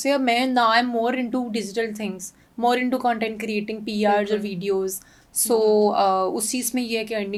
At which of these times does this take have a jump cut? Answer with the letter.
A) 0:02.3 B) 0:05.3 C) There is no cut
C